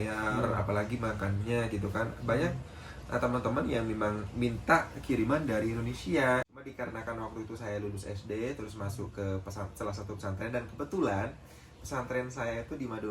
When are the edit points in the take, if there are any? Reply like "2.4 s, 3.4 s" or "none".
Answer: 6.6 s

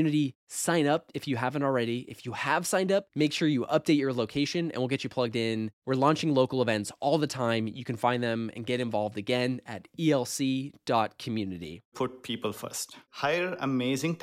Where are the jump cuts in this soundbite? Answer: 11.9 s, 13.0 s

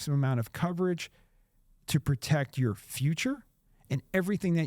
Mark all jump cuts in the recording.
none

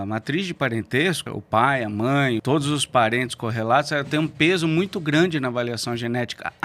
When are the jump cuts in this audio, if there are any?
1.3 s, 2.4 s

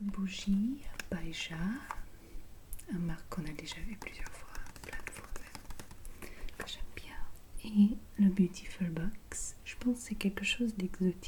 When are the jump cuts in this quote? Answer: none

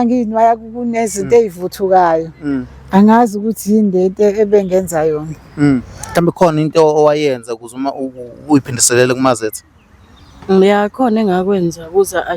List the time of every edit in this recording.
6.0 s

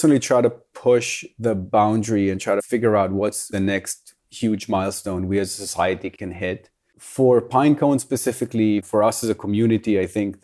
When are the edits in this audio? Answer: 3.5 s, 8.9 s

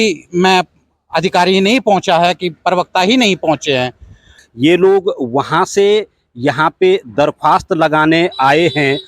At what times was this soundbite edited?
4.4 s

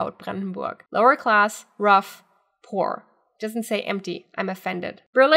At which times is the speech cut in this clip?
none

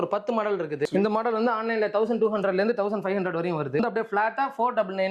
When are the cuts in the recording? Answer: 0.8 s, 3.8 s

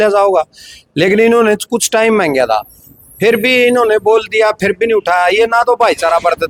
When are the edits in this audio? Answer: none

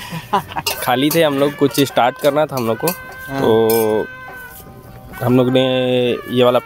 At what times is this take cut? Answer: none

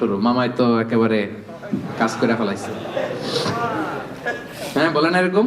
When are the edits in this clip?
none

